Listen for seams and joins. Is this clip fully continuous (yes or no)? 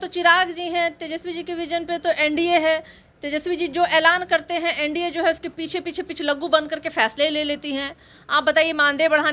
yes